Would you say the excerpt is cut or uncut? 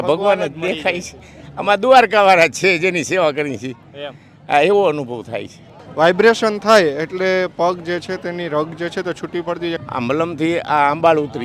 cut